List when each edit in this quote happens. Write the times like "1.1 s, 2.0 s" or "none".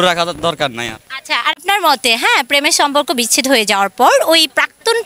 1.6 s